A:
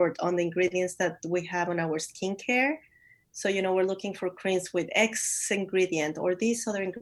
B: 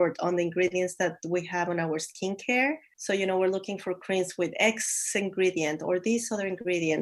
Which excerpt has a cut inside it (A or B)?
B